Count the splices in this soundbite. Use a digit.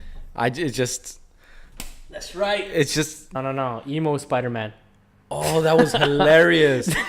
1